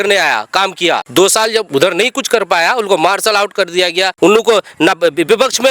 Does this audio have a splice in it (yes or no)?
yes